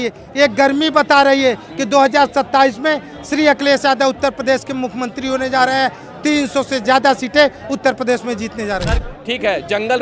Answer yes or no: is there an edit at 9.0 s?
yes